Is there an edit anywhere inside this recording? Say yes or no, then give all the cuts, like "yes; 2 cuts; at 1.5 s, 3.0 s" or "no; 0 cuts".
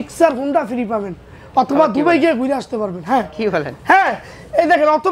no; 0 cuts